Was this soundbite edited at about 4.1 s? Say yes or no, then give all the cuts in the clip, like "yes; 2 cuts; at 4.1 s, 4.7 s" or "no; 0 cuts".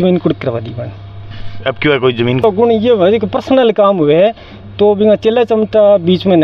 no; 1 cut; at 2.4 s